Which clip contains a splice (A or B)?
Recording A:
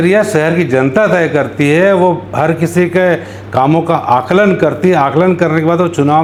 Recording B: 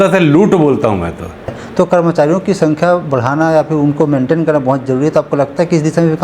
B